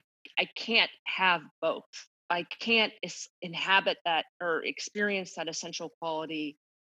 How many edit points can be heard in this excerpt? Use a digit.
1